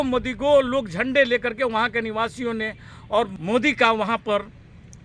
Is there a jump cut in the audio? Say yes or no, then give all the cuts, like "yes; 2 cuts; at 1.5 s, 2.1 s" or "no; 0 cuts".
yes; 1 cut; at 3.4 s